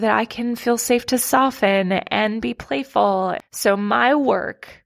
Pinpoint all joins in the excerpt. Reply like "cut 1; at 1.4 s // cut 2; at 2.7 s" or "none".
cut 1; at 3.5 s